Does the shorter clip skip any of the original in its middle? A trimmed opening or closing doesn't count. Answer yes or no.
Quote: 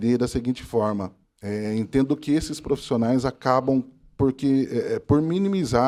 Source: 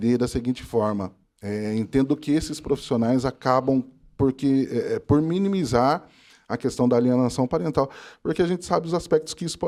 no